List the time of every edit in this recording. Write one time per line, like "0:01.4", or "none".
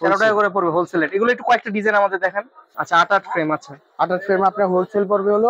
0:02.7